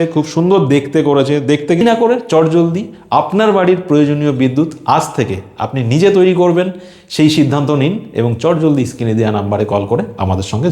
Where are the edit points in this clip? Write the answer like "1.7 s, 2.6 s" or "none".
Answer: 1.8 s